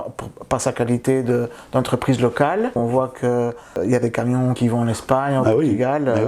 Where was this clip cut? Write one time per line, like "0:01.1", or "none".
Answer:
0:02.8
0:03.8
0:04.6

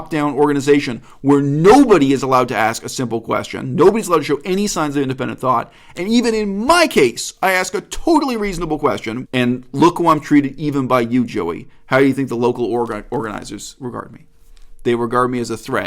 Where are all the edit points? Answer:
0:09.1

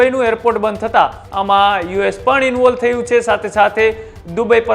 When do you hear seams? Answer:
0:01.2

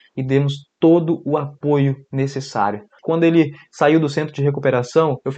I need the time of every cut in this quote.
0:03.0

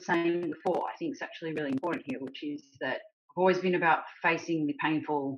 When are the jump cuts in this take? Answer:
0:03.2

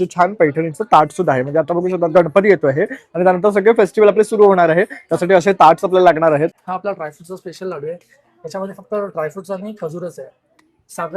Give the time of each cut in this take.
0:06.7

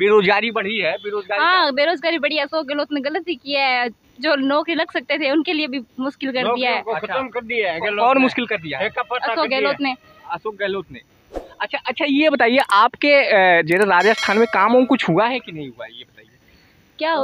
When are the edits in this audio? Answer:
none

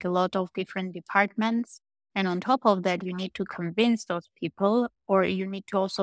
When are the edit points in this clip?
none

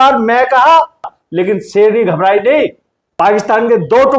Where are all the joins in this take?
0:01.2
0:03.0

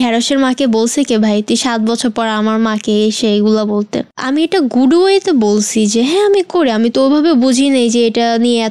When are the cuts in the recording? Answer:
0:04.0

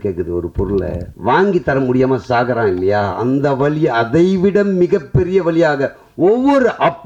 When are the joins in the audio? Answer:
0:01.1

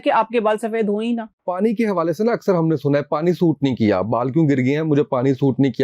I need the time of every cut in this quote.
0:01.4

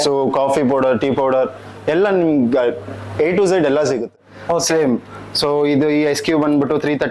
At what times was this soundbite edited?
0:04.3

